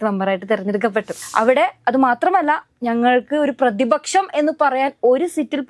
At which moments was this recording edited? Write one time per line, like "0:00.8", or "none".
0:01.2